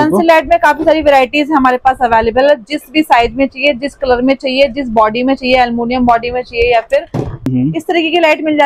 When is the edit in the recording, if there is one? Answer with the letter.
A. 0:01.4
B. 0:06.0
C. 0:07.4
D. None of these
C